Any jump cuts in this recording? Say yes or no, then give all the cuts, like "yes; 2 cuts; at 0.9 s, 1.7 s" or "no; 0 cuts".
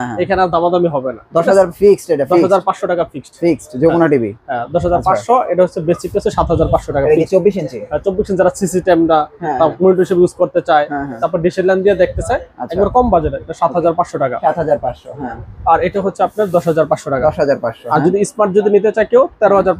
no; 0 cuts